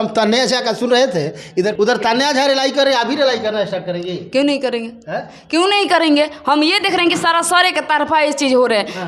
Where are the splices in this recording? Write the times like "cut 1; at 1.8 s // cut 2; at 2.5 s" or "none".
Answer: none